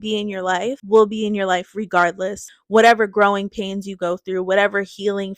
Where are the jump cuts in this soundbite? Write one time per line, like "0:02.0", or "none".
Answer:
0:00.8
0:02.4